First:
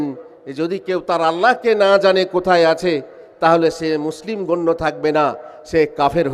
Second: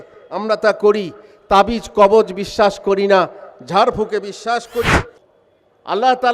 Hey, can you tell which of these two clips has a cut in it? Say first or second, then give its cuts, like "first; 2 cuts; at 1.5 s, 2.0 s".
second; 1 cut; at 5.2 s